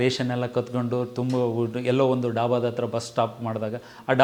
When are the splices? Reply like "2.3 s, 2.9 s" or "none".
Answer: none